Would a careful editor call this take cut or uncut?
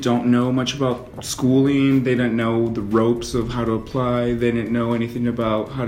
uncut